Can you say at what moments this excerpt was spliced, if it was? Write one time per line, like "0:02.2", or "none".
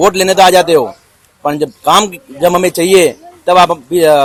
none